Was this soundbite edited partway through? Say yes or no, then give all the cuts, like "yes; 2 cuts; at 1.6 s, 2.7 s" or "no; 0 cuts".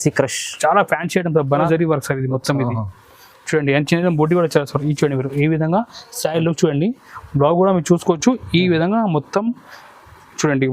yes; 1 cut; at 1.6 s